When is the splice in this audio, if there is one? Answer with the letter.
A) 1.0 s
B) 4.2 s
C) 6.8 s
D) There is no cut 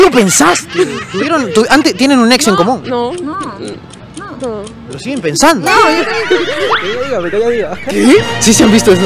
C